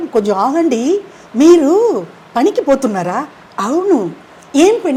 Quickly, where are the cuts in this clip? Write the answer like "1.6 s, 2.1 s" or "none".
none